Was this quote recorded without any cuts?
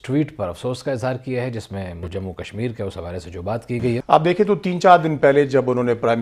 no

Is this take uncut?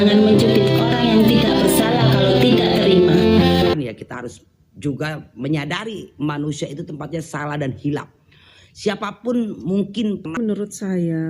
no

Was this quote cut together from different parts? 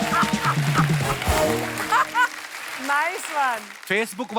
no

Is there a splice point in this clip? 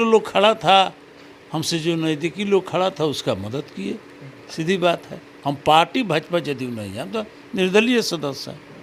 no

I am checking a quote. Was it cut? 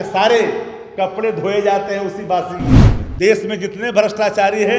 yes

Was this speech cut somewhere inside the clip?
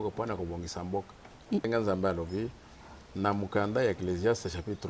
yes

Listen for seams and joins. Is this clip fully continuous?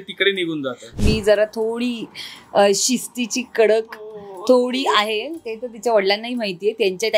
no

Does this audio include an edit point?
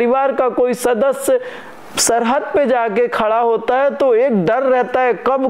no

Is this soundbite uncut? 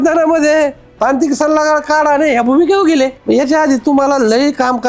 no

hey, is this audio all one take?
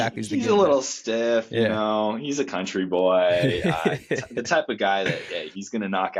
yes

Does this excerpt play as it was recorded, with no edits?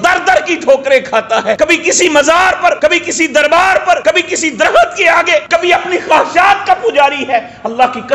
no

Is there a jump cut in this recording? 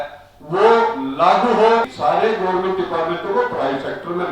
yes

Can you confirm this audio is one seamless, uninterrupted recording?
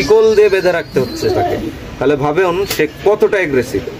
yes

